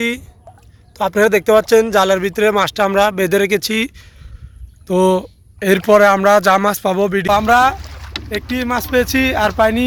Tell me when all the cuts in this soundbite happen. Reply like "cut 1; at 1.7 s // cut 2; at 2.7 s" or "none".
none